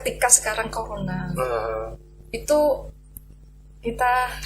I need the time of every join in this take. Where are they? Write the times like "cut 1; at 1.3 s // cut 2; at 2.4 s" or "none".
none